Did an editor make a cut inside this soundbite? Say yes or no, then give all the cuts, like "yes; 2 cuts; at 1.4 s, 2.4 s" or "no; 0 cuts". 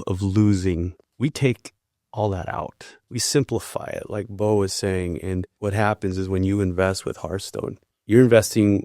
yes; 4 cuts; at 1.0 s, 2.9 s, 5.5 s, 7.9 s